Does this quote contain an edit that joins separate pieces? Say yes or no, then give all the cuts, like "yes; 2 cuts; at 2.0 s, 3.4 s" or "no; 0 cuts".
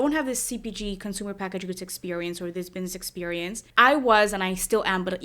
yes; 1 cut; at 3.6 s